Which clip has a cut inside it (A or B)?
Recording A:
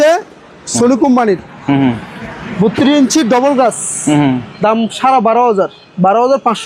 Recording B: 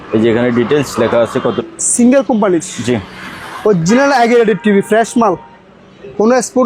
B